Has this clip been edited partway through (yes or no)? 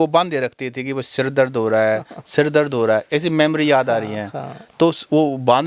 no